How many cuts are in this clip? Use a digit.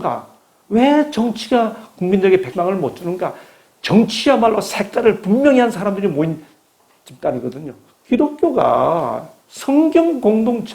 2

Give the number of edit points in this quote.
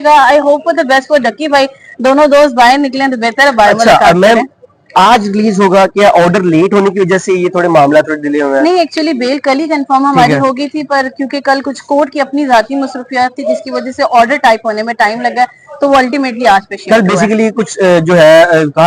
0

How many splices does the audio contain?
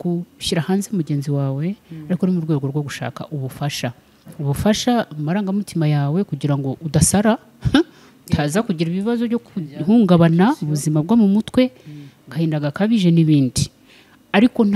0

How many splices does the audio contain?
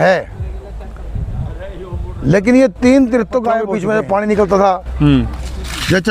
1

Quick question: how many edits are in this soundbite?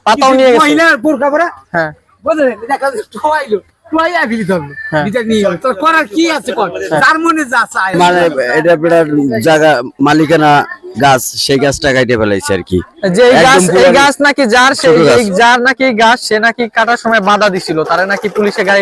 1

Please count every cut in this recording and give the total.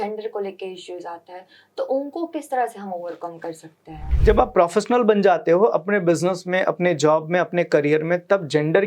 1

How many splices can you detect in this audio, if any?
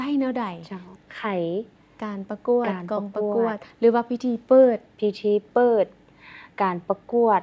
1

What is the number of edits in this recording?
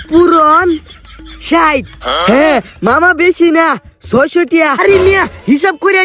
1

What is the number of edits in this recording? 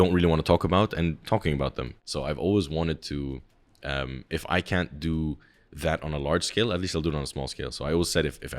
1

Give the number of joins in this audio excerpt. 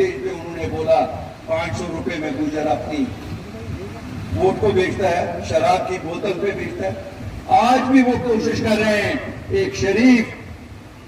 1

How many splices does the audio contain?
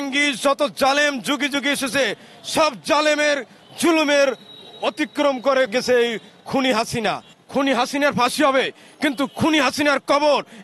2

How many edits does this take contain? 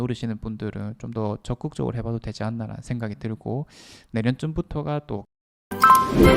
1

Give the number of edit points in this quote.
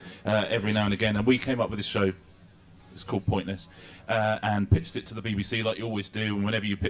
0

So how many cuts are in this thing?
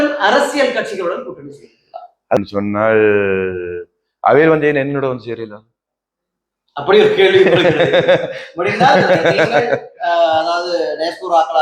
1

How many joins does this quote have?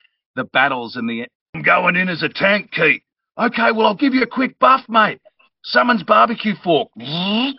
1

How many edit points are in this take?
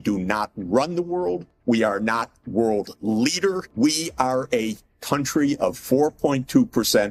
2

